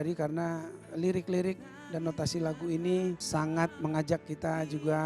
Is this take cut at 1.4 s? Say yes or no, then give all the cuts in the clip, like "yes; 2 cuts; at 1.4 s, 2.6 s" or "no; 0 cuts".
no; 1 cut; at 3.2 s